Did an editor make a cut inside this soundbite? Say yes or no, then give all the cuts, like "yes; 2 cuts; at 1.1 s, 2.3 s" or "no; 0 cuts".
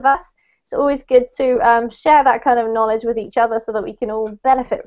yes; 1 cut; at 3.8 s